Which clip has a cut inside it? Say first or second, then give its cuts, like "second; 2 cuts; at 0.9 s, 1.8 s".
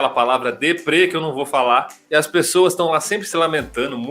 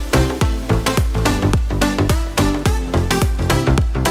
first; 1 cut; at 2.0 s